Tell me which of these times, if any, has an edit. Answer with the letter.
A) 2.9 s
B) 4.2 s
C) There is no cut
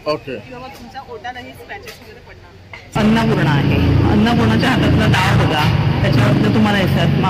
A